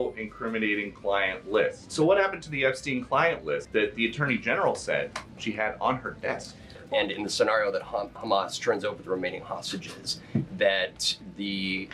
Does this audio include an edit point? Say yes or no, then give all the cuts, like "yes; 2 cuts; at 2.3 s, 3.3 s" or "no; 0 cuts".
yes; 4 cuts; at 1.8 s, 3.7 s, 5.2 s, 6.8 s